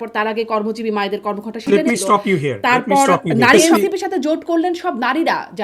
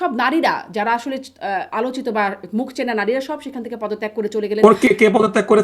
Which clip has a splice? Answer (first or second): first